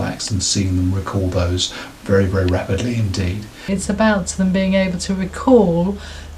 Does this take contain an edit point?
yes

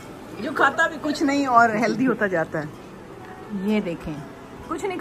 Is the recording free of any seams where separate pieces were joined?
yes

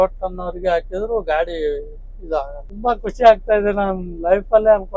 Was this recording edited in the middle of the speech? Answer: yes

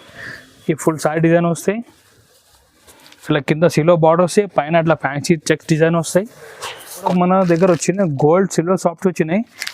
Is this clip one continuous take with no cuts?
no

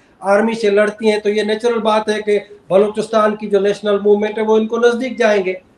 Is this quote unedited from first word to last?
yes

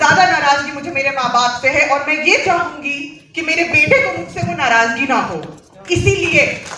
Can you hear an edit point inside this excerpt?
no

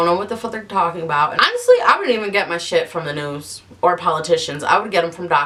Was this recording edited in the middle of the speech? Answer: no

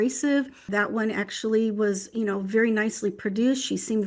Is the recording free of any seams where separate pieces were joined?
yes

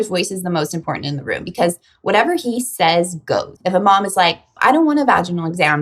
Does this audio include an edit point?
yes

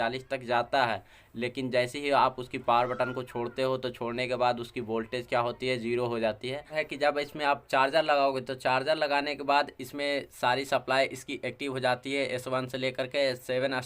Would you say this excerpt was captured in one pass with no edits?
no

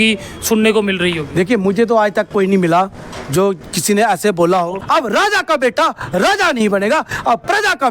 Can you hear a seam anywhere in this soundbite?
yes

